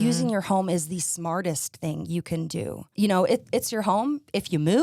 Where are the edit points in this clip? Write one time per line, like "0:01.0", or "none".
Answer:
0:02.8